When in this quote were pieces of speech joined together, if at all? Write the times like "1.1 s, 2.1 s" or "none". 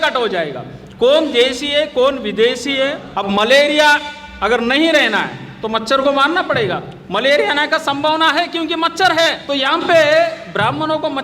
3.1 s, 6.9 s, 9.4 s

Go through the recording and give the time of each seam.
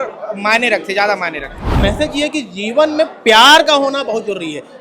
1.7 s

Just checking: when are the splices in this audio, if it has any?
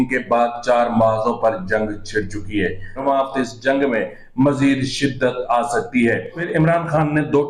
3.0 s, 6.4 s

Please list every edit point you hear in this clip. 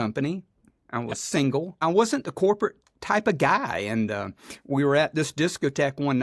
1.8 s

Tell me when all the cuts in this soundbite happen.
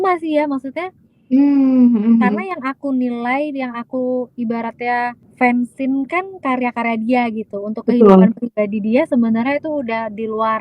5.2 s

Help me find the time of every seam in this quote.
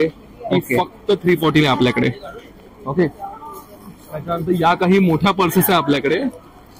none

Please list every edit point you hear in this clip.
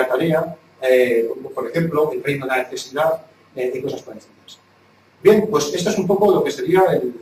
none

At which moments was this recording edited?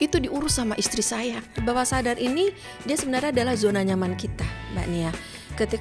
1.6 s

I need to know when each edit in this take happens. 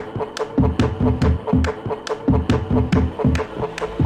1.2 s, 2.8 s

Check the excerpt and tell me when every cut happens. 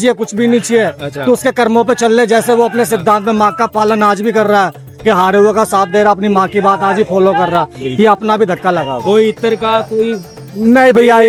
none

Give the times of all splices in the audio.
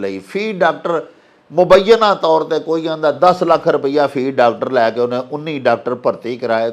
none

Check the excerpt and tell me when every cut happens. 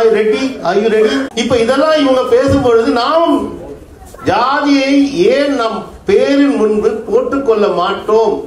1.3 s

